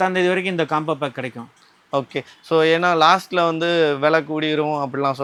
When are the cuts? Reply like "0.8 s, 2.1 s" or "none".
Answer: none